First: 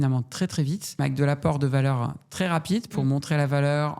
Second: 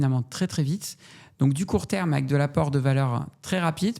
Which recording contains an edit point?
first; 1 cut; at 1.0 s

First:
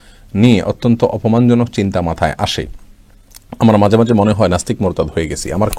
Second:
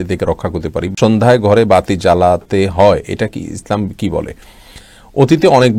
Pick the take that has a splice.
second; 2 cuts; at 0.9 s, 4.8 s

